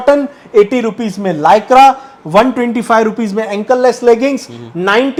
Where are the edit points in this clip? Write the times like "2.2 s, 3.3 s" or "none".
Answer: none